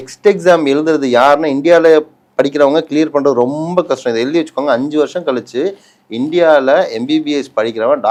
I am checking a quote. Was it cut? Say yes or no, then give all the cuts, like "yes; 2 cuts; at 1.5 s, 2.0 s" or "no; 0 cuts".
no; 0 cuts